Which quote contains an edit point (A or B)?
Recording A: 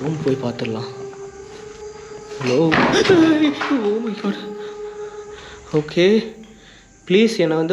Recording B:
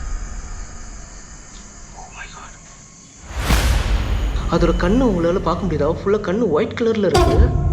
B